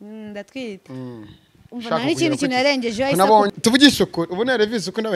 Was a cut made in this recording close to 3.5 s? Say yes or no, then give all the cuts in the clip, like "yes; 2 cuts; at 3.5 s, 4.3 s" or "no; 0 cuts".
yes; 1 cut; at 3.5 s